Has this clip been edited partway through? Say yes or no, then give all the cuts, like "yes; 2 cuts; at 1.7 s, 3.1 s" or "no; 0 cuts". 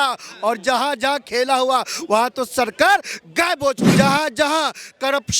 yes; 1 cut; at 3.8 s